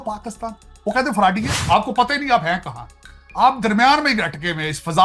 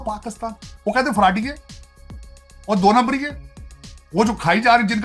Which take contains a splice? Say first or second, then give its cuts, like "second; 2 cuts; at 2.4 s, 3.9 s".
first; 1 cut; at 1.6 s